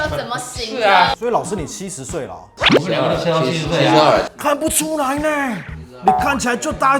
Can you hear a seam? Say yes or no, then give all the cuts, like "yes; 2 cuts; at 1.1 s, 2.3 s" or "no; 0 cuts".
yes; 1 cut; at 1.2 s